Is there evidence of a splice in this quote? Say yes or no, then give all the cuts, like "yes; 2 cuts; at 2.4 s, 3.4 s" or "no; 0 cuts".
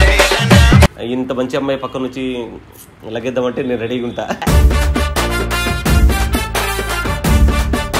yes; 1 cut; at 0.9 s